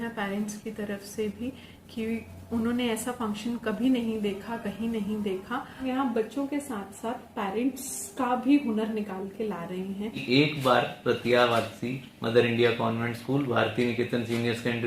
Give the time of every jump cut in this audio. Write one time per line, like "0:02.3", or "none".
0:05.8
0:10.1

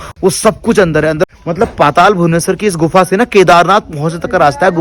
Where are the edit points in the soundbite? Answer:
0:01.3

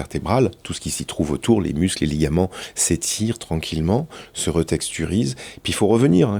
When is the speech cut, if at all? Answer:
none

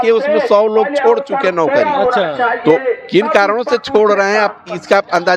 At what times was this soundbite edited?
none

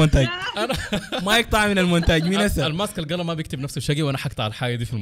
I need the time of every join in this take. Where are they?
none

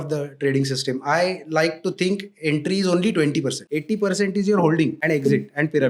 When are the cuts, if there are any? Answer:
0:03.6
0:05.0

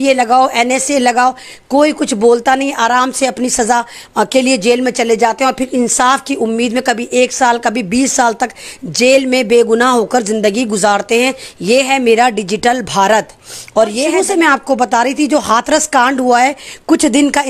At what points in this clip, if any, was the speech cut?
0:14.1

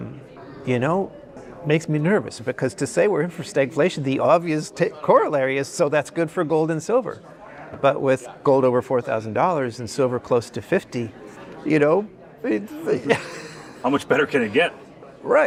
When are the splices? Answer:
none

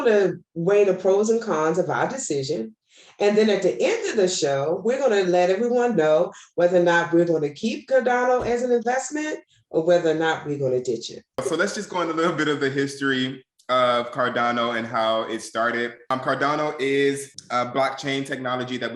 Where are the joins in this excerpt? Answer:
0:11.4
0:16.0
0:17.3

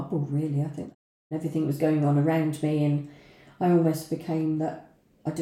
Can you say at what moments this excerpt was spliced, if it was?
0:01.0

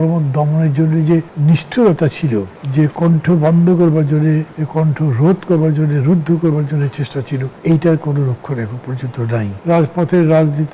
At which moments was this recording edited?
0:01.3
0:02.6
0:04.6
0:07.5
0:09.5

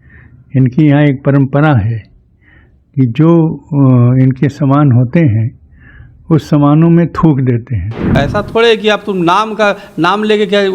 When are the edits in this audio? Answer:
0:08.1

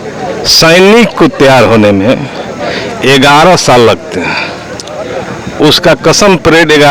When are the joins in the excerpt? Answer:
none

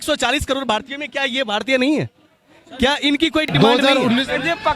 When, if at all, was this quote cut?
0:03.5

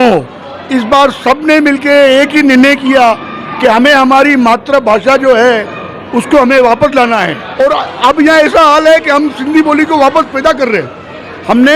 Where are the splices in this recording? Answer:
0:07.4

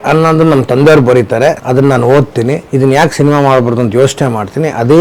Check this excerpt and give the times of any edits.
0:01.6
0:02.6

